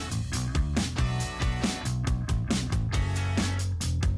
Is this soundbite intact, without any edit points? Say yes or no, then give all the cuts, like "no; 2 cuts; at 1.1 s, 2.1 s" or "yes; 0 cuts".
no; 1 cut; at 2.1 s